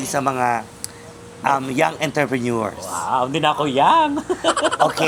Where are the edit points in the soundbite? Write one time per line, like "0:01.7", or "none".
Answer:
none